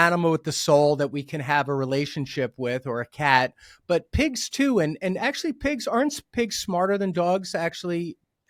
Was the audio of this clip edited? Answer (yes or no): no